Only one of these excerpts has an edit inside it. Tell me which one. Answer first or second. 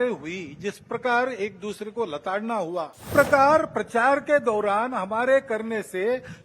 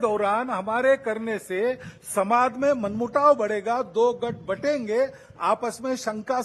first